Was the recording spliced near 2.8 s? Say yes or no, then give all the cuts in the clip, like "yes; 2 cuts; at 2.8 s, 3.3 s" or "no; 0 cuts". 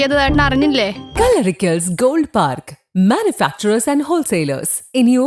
no; 1 cut; at 1.1 s